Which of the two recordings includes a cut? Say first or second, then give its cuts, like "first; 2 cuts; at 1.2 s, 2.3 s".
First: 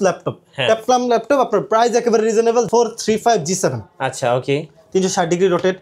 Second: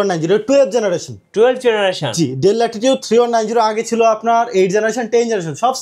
first; 1 cut; at 2.7 s